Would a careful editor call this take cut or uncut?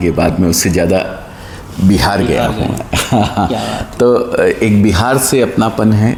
uncut